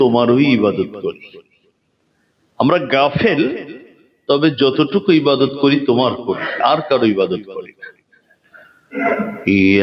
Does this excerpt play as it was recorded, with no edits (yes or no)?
yes